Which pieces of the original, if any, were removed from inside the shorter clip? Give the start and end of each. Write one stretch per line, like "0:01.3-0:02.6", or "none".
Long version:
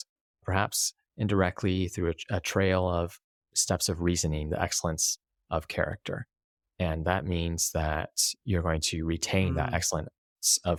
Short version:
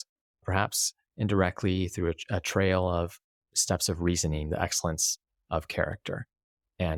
none